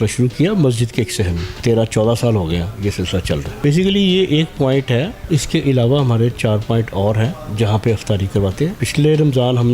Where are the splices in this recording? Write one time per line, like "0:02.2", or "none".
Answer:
0:01.5
0:03.5
0:05.2
0:08.8